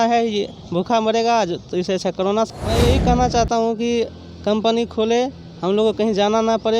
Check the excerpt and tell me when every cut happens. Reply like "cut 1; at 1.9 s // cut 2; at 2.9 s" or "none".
cut 1; at 2.5 s